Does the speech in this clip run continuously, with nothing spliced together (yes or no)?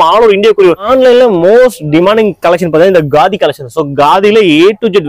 no